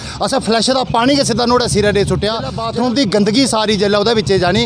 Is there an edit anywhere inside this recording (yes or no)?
yes